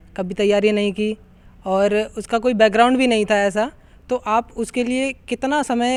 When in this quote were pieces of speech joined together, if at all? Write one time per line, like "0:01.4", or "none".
none